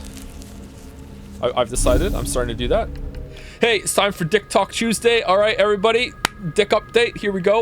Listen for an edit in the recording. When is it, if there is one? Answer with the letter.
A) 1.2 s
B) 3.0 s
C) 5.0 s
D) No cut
B